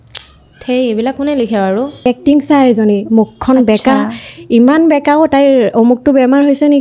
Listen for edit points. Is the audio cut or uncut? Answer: cut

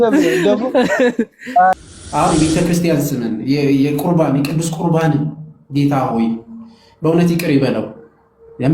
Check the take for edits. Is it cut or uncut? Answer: cut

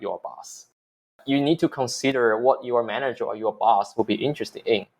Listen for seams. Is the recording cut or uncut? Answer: cut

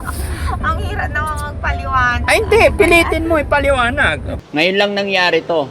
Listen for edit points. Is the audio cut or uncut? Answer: cut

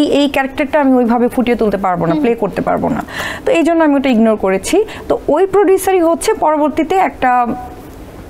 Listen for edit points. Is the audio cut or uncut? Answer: uncut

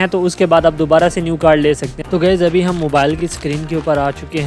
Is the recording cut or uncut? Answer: cut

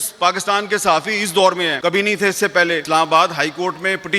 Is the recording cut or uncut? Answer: cut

